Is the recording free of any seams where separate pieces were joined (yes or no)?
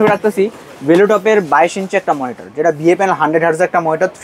yes